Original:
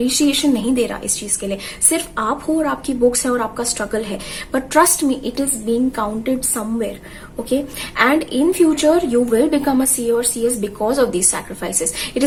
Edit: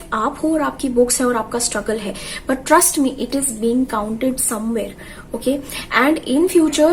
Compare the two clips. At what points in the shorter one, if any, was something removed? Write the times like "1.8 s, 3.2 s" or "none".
none